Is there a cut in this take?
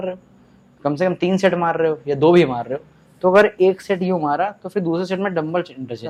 no; 0 cuts

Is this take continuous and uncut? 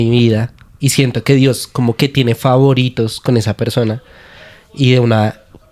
yes; 0 cuts

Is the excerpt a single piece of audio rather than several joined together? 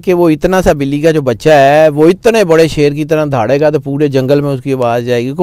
yes; 0 cuts

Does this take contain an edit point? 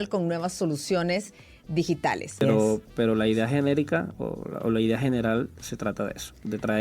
yes; 1 cut; at 2.4 s

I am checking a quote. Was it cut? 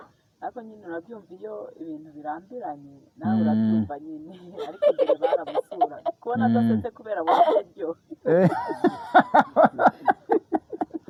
no; 0 cuts

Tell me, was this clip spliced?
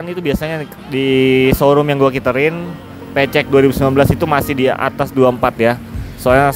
no; 0 cuts

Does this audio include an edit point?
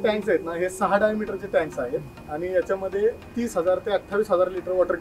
no; 0 cuts

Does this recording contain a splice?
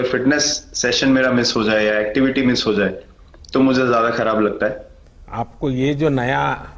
yes; 1 cut; at 5.1 s

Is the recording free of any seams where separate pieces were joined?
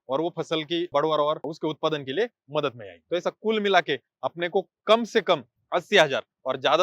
no; 4 cuts; at 0.9 s, 1.5 s, 2.9 s, 5.5 s

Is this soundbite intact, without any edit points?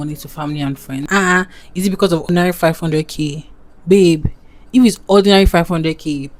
no; 1 cut; at 1.0 s

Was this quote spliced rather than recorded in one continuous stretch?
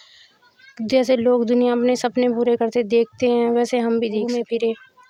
no; 0 cuts

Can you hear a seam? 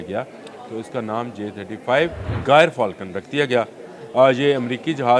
yes; 1 cut; at 2.3 s

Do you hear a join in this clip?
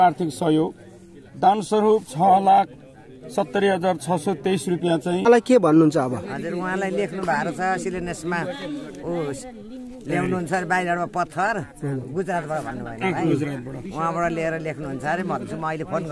yes; 1 cut; at 5.3 s

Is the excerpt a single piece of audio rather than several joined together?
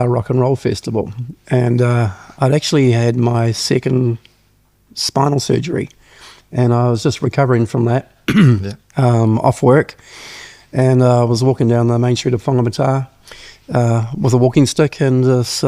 yes; 0 cuts

